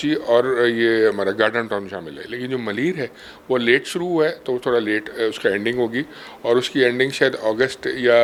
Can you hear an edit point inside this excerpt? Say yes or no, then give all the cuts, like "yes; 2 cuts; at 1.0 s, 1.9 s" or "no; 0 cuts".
no; 0 cuts